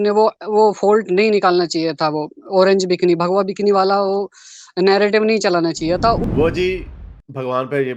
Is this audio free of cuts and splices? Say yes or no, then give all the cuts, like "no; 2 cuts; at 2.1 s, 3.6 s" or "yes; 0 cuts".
no; 1 cut; at 6.3 s